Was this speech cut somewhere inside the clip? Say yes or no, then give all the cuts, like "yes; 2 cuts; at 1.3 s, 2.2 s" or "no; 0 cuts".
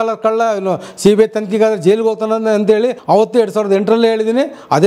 yes; 1 cut; at 3.0 s